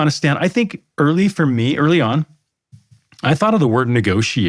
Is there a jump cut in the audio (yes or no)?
no